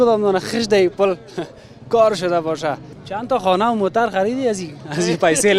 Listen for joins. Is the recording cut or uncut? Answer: cut